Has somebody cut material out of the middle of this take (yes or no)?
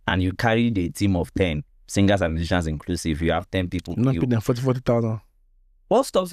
no